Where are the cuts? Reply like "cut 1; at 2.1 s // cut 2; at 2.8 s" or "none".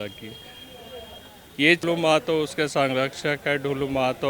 cut 1; at 1.8 s